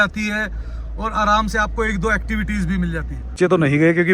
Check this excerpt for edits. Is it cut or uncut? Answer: cut